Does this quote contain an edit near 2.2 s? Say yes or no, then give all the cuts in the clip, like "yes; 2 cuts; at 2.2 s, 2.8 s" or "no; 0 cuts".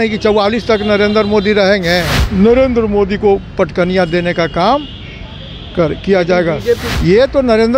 yes; 2 cuts; at 2.2 s, 6.9 s